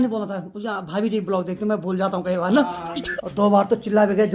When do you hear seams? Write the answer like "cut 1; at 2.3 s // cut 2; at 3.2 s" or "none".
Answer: cut 1; at 3.1 s